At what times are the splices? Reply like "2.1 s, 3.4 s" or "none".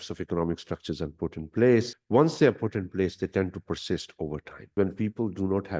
2.0 s, 4.7 s